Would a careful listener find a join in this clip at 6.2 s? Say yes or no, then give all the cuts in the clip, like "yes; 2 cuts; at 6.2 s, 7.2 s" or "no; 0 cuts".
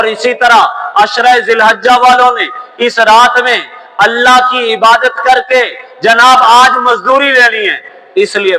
no; 0 cuts